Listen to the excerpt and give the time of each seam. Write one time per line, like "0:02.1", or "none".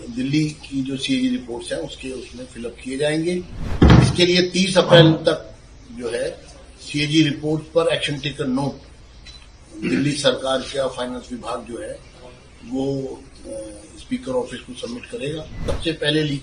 0:03.6
0:15.7